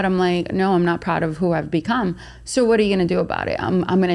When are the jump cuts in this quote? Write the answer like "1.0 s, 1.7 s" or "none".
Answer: none